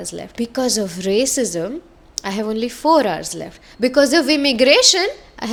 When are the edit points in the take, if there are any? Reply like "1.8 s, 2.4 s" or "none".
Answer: none